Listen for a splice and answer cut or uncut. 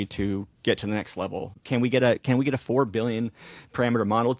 cut